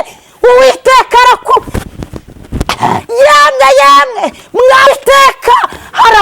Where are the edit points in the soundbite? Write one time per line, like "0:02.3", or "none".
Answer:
0:04.9

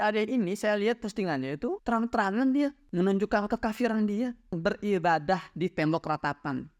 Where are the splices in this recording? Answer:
0:01.8
0:04.5

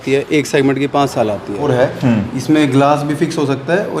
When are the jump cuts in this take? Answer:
0:01.6

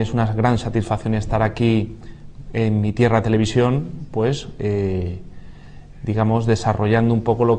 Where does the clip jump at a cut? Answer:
0:06.0

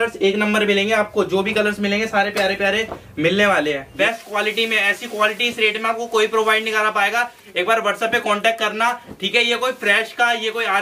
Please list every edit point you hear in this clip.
0:03.9

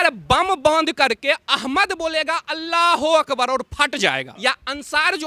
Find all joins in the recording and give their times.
0:04.3

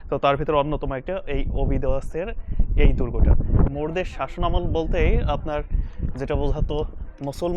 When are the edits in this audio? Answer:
0:03.7

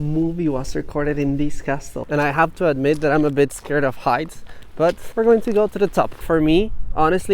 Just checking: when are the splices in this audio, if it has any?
0:02.0
0:05.0
0:06.2

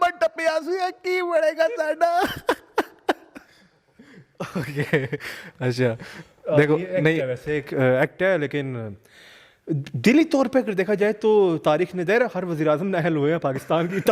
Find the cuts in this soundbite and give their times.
none

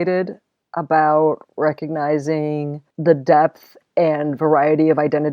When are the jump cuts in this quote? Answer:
0:02.8

